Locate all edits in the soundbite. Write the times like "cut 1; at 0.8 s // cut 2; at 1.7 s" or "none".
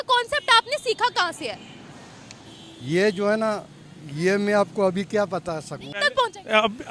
cut 1; at 5.8 s